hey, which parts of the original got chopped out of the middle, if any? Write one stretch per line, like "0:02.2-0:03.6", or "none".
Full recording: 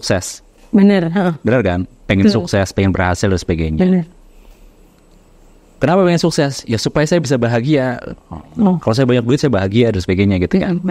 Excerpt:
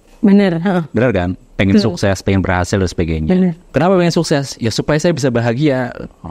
0:04.1-0:05.7